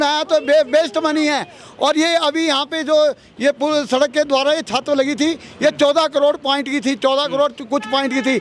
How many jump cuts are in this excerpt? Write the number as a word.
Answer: zero